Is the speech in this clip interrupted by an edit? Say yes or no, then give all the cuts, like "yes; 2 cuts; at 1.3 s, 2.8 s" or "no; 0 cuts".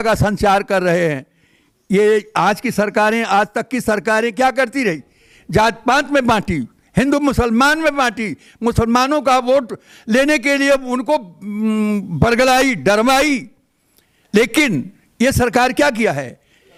no; 0 cuts